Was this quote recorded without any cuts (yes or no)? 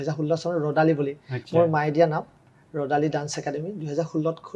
yes